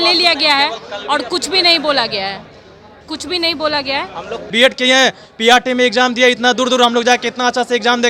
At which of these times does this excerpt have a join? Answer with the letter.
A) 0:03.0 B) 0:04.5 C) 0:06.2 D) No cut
B